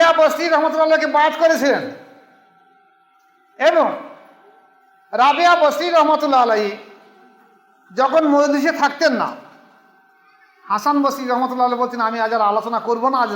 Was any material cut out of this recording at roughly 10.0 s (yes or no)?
no